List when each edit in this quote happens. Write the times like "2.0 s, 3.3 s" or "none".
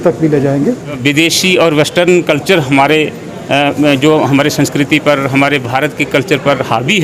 1.0 s